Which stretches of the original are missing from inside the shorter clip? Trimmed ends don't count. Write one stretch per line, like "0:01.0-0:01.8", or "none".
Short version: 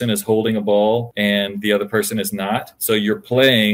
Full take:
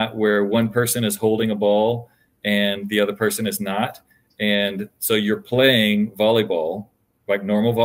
0:02.0-0:02.4
0:04.0-0:04.9